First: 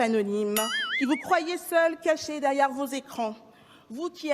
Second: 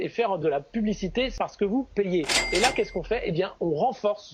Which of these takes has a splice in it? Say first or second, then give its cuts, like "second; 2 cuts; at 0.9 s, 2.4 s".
second; 2 cuts; at 1.4 s, 2.4 s